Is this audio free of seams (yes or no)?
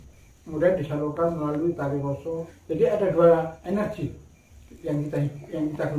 no